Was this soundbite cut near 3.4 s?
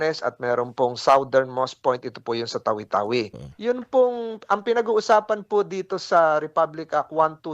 yes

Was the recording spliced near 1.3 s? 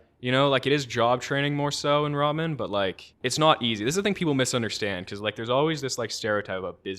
no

